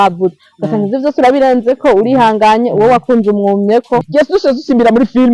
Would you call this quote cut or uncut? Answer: cut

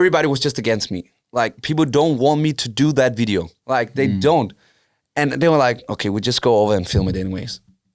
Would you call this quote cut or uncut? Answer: cut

